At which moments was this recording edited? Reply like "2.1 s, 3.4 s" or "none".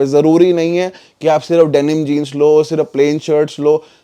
none